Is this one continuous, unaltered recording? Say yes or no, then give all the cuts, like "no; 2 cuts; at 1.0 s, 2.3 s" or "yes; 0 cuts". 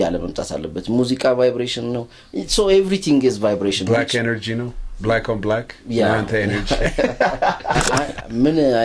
no; 1 cut; at 7.8 s